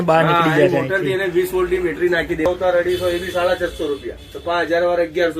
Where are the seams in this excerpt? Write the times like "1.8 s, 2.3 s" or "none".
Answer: 2.5 s